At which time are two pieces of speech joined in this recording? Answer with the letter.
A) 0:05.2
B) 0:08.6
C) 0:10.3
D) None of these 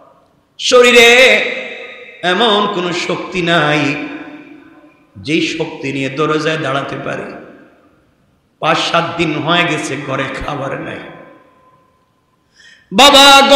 D